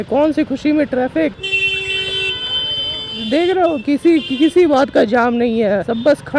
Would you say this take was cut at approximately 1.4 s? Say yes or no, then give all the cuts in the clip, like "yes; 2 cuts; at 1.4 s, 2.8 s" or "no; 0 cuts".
yes; 1 cut; at 1.4 s